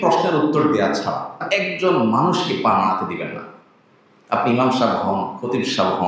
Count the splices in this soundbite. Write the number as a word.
one